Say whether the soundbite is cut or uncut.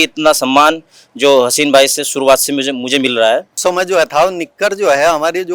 cut